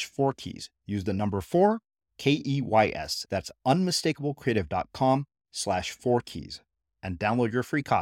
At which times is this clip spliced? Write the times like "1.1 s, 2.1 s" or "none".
none